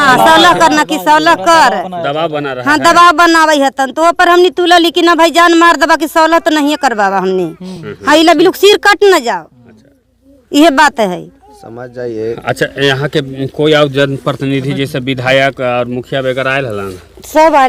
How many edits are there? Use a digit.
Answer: 0